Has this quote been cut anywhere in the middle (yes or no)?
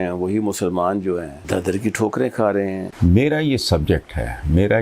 yes